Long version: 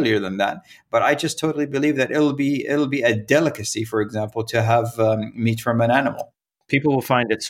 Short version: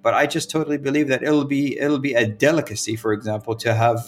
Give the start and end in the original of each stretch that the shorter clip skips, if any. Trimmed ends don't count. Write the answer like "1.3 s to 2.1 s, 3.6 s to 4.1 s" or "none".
none